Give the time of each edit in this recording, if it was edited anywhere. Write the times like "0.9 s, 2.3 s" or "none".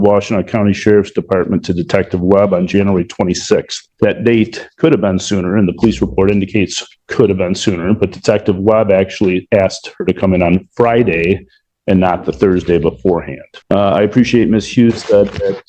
none